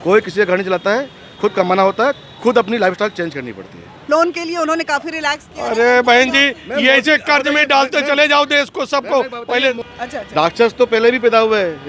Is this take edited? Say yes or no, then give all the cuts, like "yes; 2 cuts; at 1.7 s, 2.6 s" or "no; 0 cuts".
yes; 2 cuts; at 4.0 s, 9.9 s